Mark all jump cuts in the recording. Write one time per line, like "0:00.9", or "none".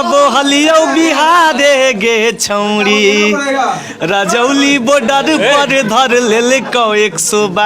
none